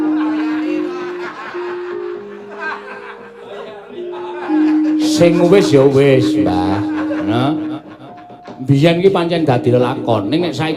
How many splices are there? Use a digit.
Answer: 0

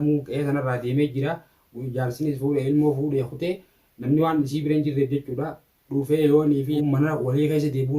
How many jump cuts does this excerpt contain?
1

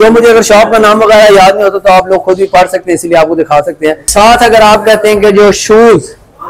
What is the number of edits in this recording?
1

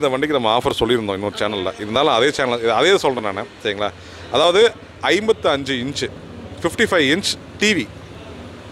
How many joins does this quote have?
0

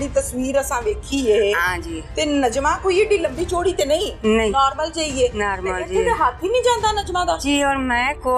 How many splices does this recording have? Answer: 0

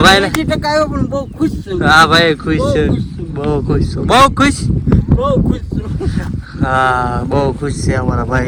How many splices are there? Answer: 0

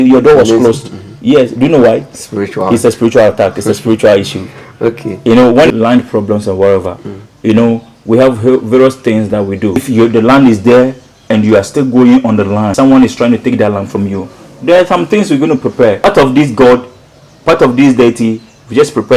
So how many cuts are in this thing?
4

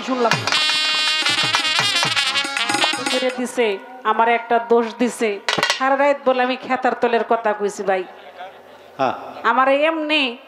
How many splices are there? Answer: 1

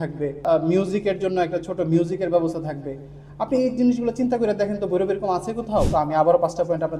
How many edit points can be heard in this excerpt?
1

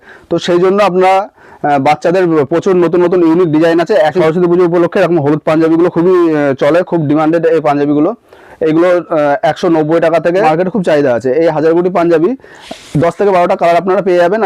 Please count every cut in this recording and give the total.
2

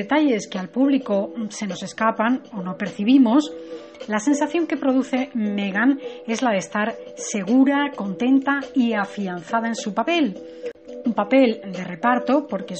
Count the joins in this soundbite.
1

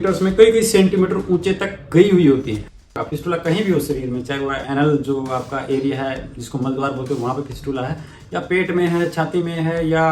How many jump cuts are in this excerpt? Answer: 1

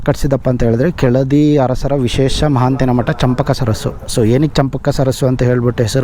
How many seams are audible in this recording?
0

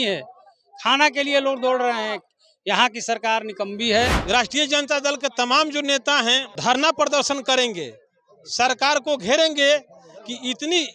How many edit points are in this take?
2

